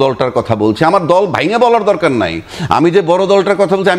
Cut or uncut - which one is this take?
uncut